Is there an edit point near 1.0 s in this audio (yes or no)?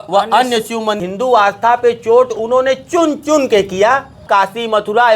yes